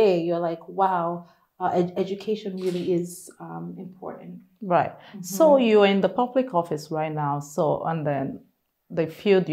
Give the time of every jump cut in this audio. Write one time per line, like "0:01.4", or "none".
none

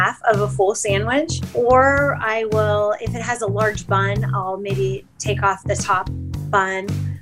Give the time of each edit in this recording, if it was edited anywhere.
0:01.4

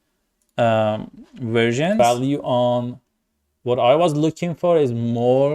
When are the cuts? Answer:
0:02.4

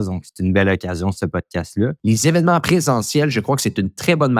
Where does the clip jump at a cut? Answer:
0:02.0
0:02.6

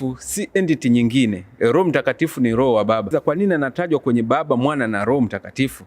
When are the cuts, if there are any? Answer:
0:03.1

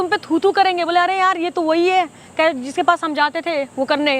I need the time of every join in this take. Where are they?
none

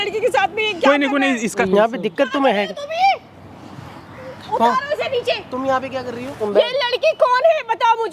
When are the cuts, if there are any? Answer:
0:01.6
0:06.4

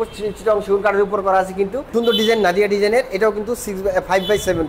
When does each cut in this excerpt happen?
0:01.9

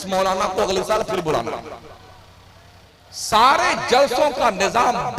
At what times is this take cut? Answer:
0:02.9

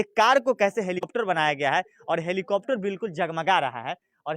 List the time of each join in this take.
0:01.1

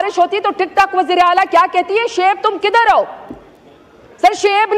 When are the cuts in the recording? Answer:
none

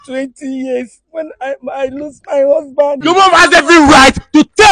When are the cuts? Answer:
0:03.0

